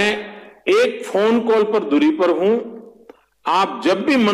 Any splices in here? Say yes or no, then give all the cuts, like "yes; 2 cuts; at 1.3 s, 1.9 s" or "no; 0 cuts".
no; 0 cuts